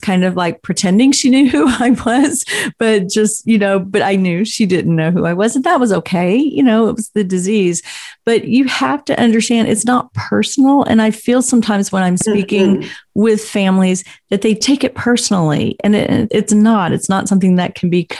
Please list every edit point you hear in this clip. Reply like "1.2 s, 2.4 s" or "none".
none